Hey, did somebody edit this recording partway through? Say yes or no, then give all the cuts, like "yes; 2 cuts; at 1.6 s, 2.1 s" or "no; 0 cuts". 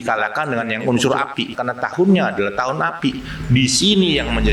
yes; 1 cut; at 1.5 s